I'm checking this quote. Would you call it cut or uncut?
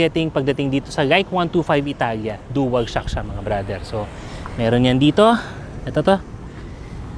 uncut